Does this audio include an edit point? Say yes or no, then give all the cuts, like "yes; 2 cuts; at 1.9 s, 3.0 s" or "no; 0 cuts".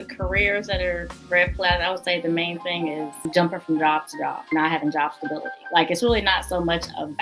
yes; 3 cuts; at 3.2 s, 4.4 s, 5.5 s